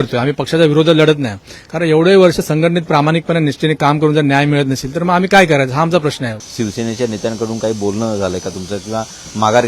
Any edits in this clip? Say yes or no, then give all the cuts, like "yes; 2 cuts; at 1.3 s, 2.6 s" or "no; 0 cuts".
yes; 1 cut; at 6.4 s